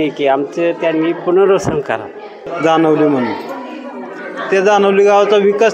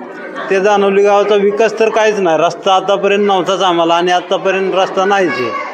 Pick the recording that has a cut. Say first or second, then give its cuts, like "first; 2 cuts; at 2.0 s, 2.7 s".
first; 1 cut; at 2.4 s